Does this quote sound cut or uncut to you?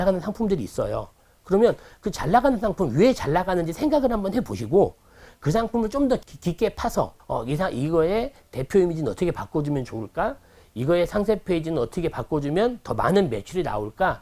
uncut